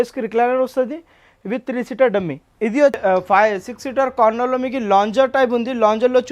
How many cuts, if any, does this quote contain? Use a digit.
1